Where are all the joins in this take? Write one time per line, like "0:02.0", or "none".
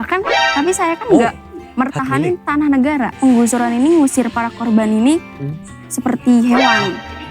0:03.1